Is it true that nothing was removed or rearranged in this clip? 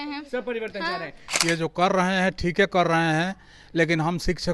no; 1 cut; at 1.2 s

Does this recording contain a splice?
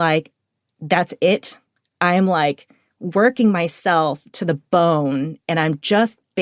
no; 0 cuts

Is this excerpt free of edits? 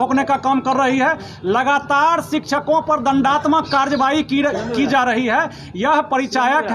yes; 0 cuts

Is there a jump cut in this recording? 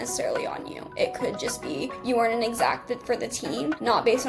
no; 0 cuts

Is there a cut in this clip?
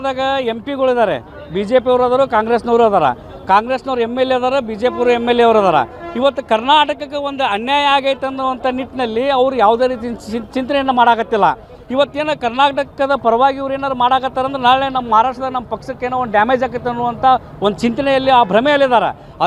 no; 0 cuts

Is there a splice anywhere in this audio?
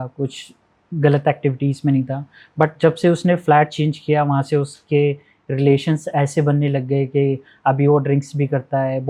no; 0 cuts

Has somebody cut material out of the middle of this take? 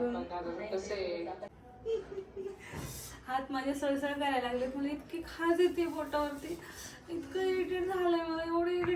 yes; 1 cut; at 1.5 s

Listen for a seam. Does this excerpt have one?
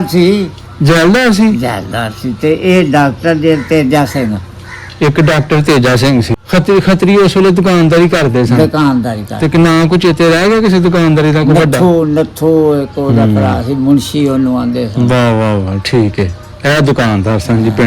yes; 1 cut; at 6.3 s

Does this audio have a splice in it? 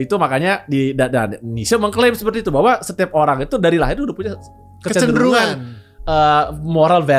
no; 0 cuts

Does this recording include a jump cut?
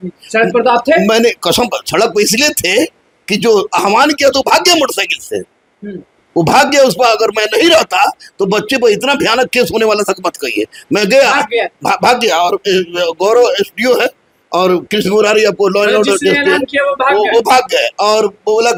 no; 0 cuts

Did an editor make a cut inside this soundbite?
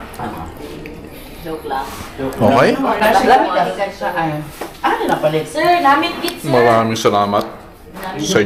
no; 0 cuts

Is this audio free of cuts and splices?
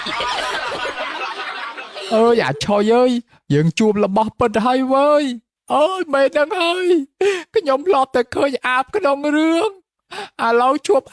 no; 1 cut; at 2.0 s

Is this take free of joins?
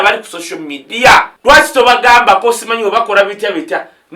no; 1 cut; at 1.3 s

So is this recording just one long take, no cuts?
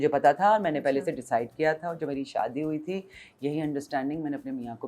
yes; 0 cuts

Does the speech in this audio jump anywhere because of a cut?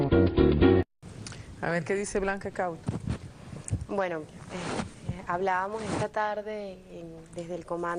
no; 0 cuts

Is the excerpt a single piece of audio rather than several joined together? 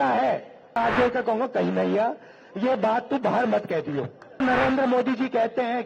no; 2 cuts; at 0.8 s, 4.4 s

